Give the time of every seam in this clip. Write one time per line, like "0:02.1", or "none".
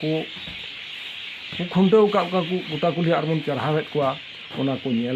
none